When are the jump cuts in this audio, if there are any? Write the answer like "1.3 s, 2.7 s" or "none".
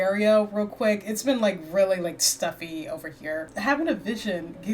3.5 s